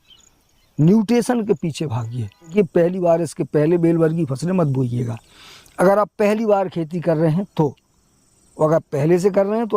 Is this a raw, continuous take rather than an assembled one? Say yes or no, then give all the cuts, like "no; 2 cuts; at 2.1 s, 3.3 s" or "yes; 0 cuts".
no; 1 cut; at 2.5 s